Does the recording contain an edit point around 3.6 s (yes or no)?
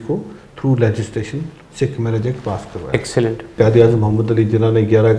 yes